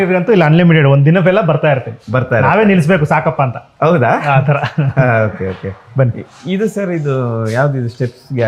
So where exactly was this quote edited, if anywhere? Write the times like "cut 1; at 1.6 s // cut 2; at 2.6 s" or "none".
none